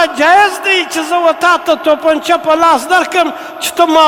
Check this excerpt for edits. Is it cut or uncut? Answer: uncut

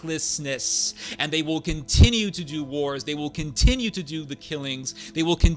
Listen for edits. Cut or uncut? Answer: uncut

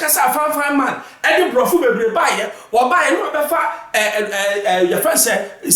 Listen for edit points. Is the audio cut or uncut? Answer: uncut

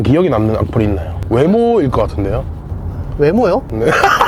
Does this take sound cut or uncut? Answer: uncut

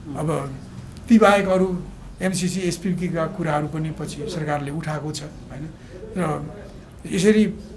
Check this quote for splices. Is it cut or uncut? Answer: uncut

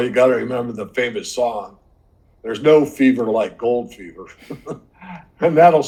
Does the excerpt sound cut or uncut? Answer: uncut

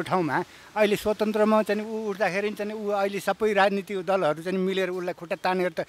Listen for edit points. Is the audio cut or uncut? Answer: uncut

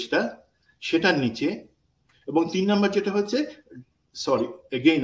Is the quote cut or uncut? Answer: uncut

